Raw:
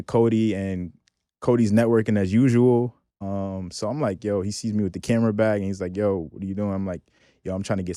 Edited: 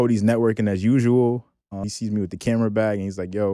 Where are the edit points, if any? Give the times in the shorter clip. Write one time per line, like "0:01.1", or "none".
0:01.9